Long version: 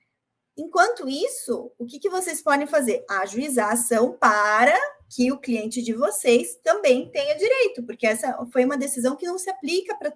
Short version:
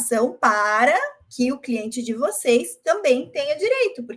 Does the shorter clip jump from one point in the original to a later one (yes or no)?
no